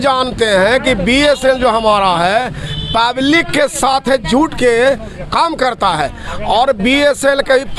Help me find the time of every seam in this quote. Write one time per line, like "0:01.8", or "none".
none